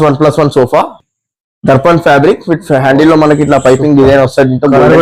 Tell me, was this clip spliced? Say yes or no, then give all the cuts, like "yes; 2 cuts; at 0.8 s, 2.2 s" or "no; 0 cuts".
yes; 1 cut; at 1.0 s